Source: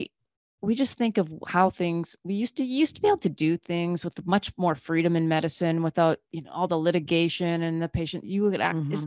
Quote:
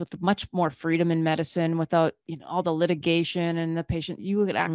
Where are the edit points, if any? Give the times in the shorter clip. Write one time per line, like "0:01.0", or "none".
none